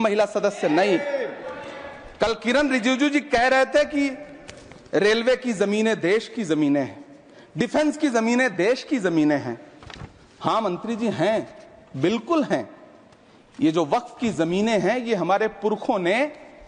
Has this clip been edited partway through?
no; 0 cuts

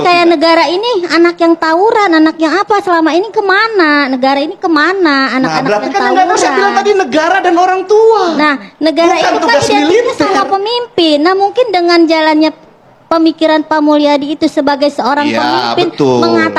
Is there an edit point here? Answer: no; 0 cuts

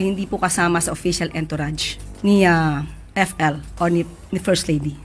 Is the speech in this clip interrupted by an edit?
no; 0 cuts

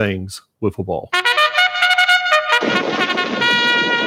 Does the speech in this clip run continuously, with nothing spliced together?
no; 1 cut; at 1.1 s

